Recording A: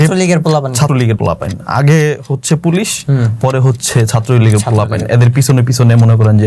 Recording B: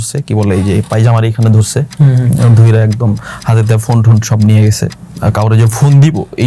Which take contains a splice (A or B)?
A